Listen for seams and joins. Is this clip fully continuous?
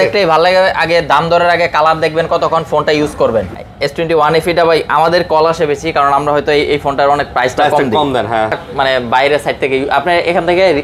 no; 2 cuts; at 3.5 s, 8.6 s

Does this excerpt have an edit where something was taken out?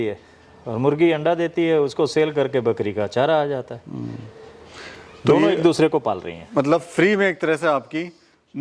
no; 0 cuts

